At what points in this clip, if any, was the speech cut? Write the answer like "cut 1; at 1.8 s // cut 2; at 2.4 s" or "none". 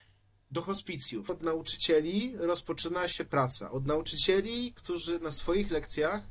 cut 1; at 1.3 s